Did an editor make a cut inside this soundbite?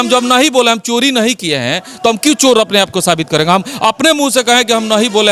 no; 0 cuts

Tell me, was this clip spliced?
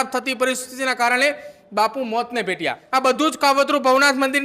yes; 1 cut; at 2.8 s

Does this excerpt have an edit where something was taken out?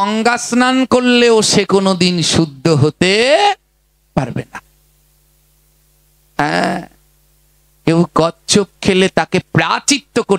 no; 0 cuts

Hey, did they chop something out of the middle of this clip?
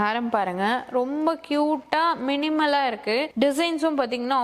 no; 0 cuts

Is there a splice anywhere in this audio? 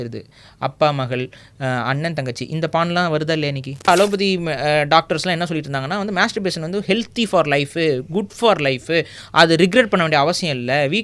yes; 1 cut; at 3.9 s

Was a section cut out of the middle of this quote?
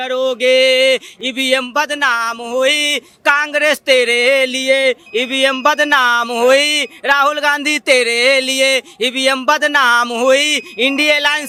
no; 0 cuts

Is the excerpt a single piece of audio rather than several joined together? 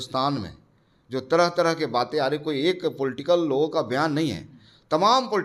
yes; 0 cuts

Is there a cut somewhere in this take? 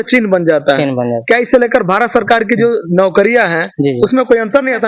no; 0 cuts

